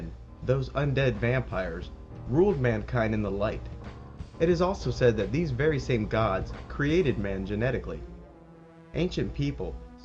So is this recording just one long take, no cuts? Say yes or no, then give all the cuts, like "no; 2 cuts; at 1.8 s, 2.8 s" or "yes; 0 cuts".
yes; 0 cuts